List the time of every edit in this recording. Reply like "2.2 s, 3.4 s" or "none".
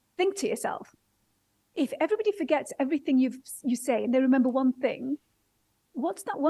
none